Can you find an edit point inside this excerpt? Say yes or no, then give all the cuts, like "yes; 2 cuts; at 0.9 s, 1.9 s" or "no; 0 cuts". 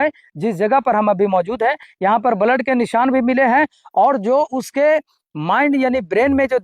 no; 0 cuts